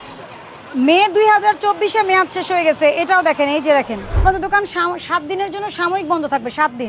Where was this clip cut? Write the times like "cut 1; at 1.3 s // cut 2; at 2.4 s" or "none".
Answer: cut 1; at 4.1 s